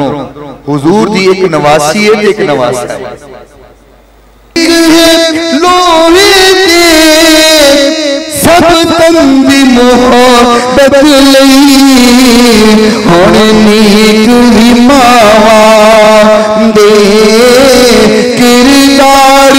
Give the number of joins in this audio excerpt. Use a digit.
1